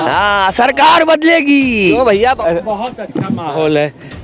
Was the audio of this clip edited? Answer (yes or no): yes